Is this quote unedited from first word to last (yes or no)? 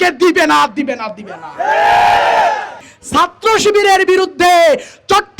no